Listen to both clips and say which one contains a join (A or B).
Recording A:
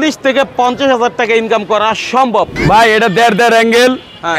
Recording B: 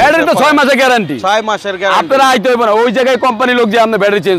A